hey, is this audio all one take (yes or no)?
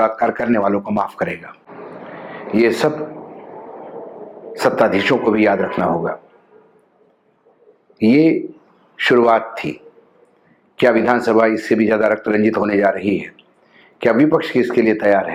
yes